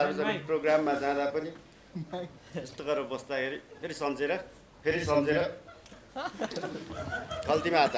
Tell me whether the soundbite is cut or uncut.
uncut